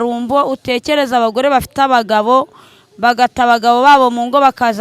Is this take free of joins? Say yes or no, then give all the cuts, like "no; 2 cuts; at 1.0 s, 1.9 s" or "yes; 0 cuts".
yes; 0 cuts